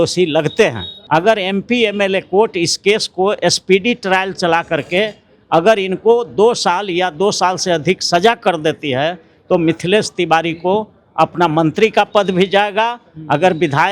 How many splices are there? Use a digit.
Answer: 1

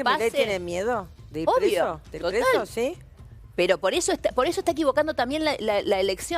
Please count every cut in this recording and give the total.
0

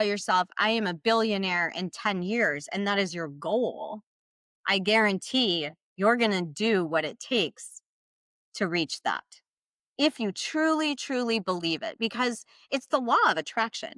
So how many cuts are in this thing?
0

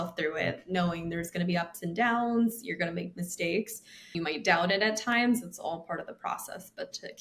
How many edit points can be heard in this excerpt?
1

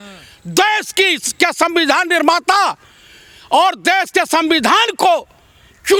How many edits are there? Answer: 0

